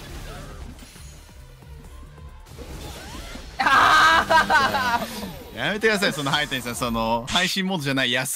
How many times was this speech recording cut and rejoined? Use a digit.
0